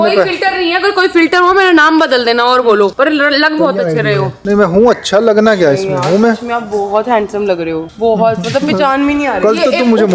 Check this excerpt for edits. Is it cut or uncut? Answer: uncut